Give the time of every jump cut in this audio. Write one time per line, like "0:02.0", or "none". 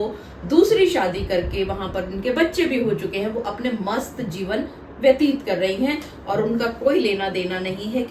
none